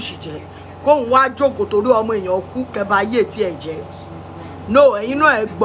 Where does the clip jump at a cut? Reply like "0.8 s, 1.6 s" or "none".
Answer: none